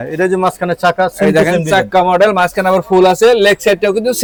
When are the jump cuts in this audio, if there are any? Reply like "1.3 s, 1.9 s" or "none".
none

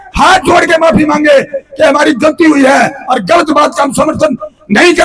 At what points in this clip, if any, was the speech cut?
none

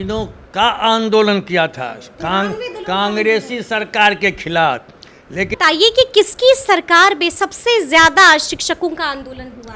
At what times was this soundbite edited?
5.5 s

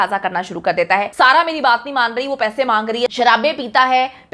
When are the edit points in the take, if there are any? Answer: 1.1 s, 3.1 s

